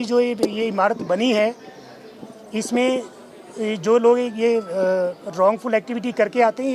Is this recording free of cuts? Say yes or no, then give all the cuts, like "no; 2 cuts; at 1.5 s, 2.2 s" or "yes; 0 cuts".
yes; 0 cuts